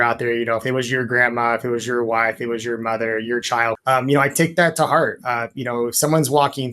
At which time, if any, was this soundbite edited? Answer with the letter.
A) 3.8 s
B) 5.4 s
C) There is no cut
A